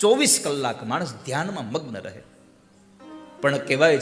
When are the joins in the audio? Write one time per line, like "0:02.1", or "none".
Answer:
0:03.1